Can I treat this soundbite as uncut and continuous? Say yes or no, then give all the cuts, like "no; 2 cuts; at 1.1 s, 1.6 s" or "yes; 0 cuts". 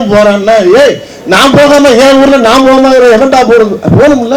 yes; 0 cuts